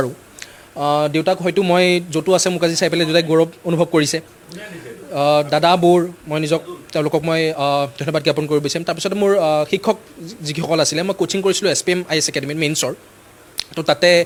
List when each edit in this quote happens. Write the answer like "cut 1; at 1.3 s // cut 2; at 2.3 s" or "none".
none

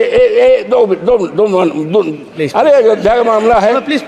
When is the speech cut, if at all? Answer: none

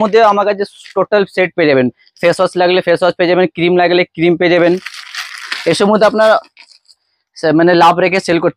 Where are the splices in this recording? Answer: none

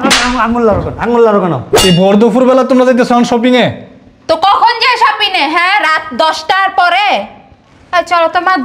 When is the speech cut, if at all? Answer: cut 1; at 1.7 s

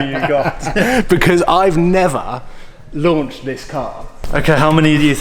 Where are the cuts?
cut 1; at 4.1 s

